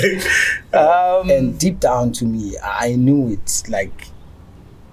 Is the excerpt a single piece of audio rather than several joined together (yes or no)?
no